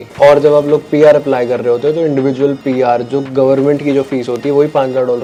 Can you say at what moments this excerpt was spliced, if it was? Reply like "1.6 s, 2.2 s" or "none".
none